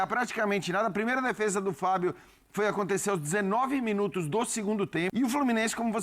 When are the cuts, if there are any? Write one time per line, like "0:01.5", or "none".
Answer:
0:05.1